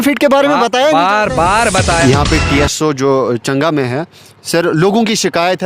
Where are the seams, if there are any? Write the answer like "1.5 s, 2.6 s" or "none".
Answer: 2.1 s